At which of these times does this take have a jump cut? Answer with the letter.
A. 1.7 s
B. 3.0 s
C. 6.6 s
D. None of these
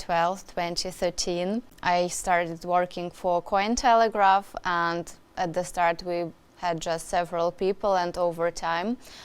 A